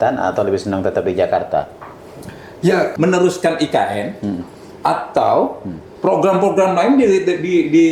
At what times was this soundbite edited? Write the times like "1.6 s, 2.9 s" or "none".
2.9 s